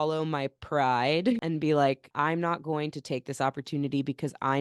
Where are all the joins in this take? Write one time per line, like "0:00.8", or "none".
0:01.4
0:02.1